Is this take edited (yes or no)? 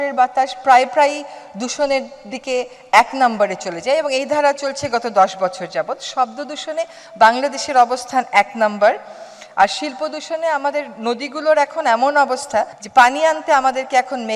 no